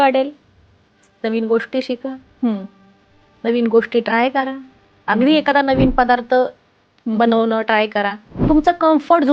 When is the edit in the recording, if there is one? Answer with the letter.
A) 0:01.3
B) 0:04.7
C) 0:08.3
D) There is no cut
C